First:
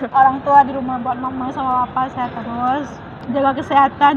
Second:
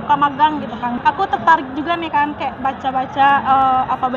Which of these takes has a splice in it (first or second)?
second